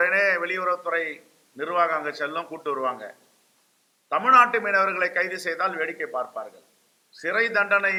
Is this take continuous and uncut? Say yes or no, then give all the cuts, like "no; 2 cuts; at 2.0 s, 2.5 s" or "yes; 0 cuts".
yes; 0 cuts